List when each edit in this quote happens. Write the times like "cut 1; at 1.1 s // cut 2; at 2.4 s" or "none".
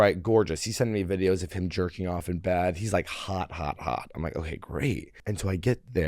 cut 1; at 5.1 s